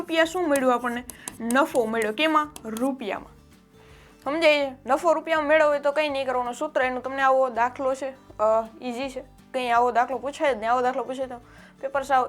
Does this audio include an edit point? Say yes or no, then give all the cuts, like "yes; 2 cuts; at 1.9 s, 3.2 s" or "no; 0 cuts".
no; 0 cuts